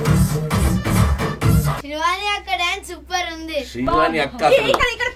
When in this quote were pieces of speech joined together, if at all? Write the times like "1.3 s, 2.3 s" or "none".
1.8 s